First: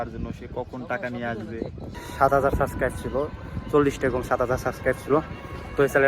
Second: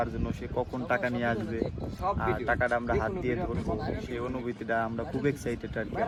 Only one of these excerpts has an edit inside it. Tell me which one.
first; 1 cut; at 1.9 s

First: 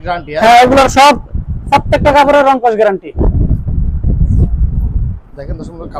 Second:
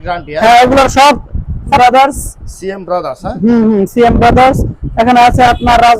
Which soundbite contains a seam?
second; 1 cut; at 1.8 s

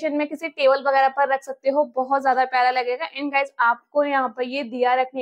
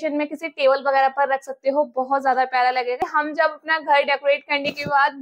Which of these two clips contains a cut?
second; 1 cut; at 3.1 s

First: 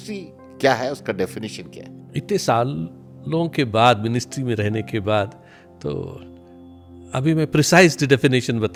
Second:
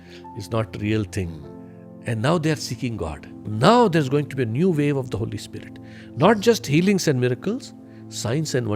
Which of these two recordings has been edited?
second; 1 cut; at 3.5 s

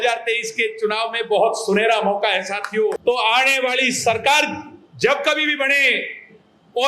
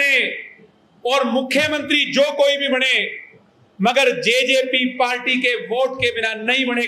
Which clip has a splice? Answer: first; 1 cut; at 3.0 s

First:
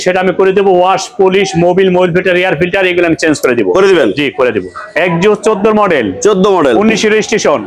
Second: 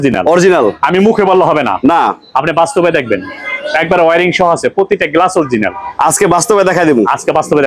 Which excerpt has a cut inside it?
first; 1 cut; at 4.9 s

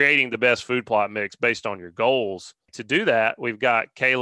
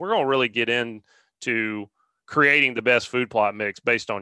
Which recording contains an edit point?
first; 1 cut; at 2.7 s

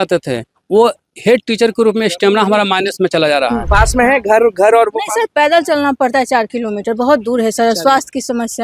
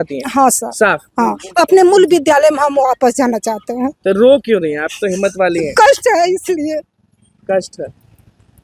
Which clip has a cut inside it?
first; 1 cut; at 3.6 s

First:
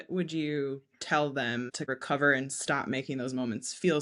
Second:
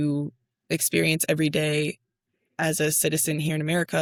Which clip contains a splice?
first; 1 cut; at 1.9 s

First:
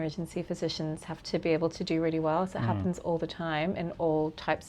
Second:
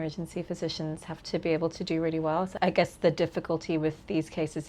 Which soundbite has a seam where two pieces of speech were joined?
second; 1 cut; at 2.5 s

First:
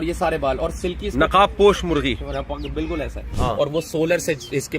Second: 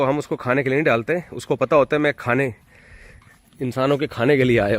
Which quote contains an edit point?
first; 1 cut; at 3.3 s

